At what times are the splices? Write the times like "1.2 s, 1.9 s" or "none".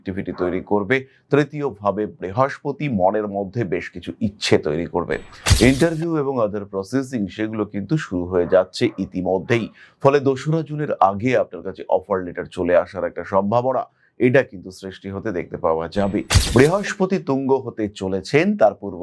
5.4 s, 16.4 s